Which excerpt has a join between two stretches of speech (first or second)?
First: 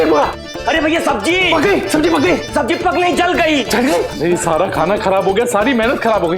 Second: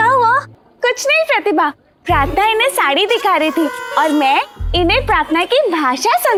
first